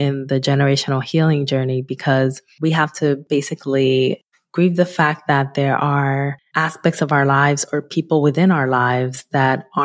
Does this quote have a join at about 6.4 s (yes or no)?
yes